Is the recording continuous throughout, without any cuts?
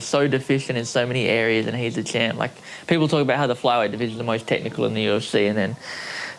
yes; 0 cuts

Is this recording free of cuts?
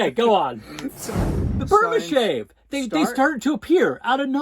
no; 1 cut; at 1.0 s

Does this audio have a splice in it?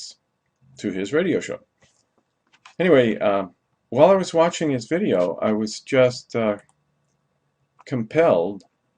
yes; 1 cut; at 6.2 s

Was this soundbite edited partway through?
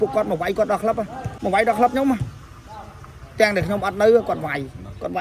yes; 1 cut; at 1.2 s

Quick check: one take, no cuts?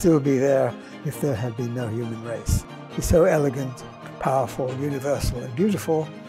no; 1 cut; at 2.7 s

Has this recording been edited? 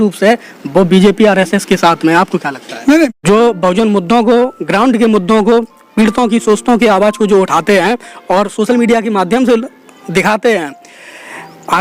yes; 1 cut; at 3.2 s

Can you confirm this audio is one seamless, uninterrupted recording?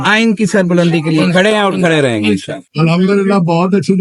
no; 1 cut; at 2.6 s

